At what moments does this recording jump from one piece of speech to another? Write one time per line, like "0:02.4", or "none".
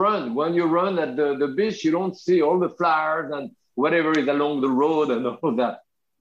none